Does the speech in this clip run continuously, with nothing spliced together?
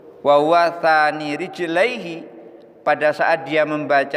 yes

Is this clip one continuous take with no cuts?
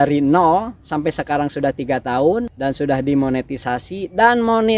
no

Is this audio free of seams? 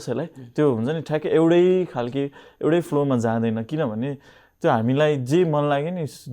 yes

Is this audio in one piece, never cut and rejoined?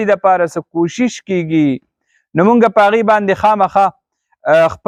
yes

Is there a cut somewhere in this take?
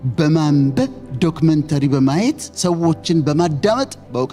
no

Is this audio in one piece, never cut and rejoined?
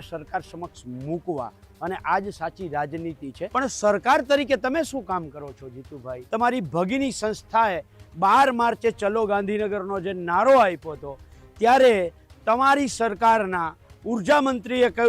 no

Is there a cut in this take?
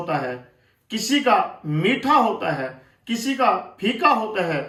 no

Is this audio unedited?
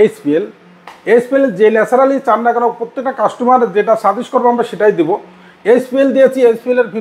yes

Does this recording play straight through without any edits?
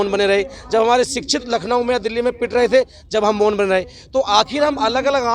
yes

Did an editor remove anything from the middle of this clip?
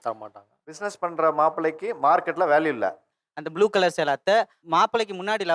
yes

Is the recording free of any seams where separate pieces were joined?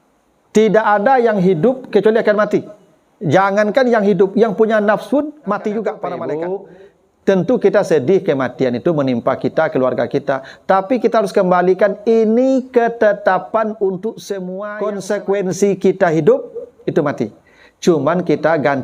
no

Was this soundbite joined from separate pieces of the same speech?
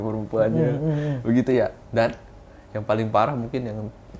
no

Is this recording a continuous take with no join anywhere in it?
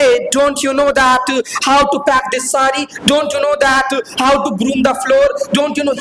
yes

